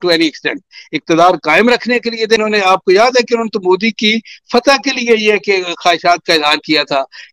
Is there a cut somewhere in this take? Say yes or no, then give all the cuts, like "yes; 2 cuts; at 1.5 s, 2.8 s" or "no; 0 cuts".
yes; 1 cut; at 2.4 s